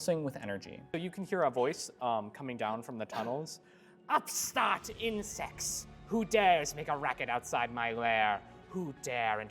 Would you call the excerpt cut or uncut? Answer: cut